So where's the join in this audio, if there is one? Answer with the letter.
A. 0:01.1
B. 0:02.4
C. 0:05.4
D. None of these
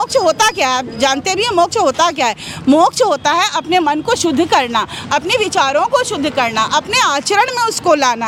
D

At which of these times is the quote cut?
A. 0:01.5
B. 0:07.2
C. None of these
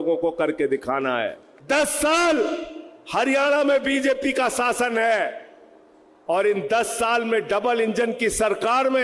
A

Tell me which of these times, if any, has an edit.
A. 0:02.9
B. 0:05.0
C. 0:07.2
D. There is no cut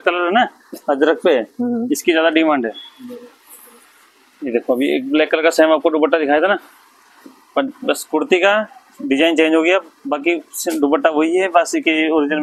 D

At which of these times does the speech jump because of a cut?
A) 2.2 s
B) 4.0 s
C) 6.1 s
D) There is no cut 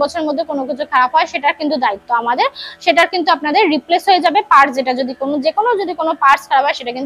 D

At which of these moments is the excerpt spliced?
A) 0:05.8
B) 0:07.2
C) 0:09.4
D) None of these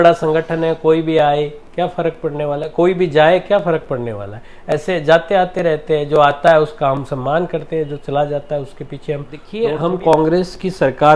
C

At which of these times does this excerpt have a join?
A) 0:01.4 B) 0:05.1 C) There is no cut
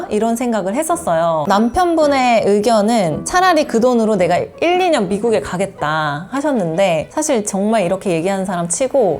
A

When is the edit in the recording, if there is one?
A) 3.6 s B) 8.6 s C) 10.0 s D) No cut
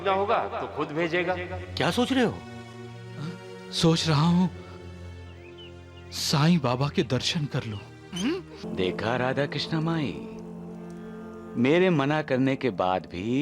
B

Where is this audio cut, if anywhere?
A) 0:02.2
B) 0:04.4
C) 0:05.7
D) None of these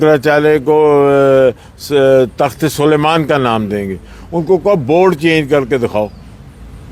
D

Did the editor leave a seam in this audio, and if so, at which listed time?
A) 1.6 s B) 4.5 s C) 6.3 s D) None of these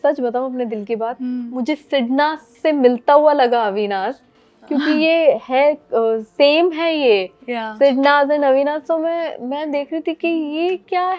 D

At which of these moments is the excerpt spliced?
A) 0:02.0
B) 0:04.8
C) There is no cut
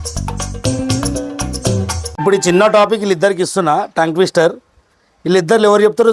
A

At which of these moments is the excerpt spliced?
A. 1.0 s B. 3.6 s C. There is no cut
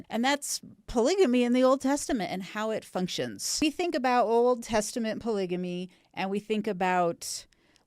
B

